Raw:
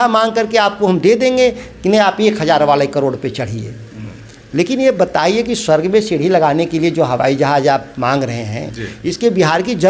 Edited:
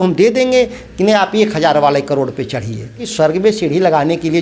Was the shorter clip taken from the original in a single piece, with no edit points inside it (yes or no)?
no